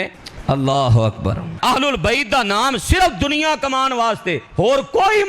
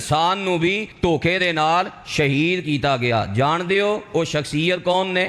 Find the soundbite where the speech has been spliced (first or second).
first